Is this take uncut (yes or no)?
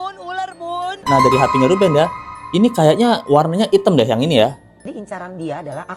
no